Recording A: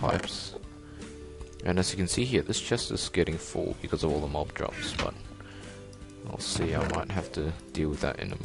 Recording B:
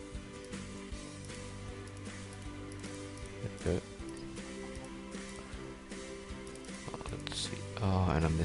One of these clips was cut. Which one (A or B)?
B